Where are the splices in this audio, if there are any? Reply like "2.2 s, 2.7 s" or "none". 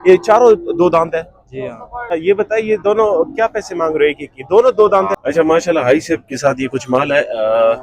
2.1 s, 5.1 s